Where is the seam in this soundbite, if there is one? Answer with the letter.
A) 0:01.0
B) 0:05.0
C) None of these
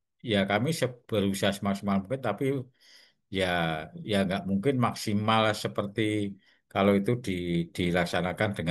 C